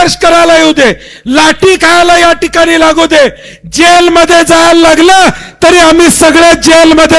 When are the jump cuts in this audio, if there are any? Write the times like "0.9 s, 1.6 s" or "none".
none